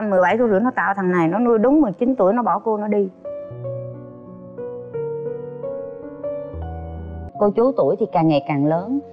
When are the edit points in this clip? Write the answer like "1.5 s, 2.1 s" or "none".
7.2 s